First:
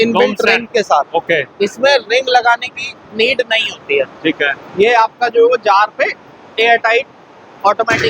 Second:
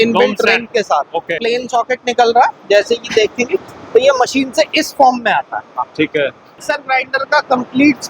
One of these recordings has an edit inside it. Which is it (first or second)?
second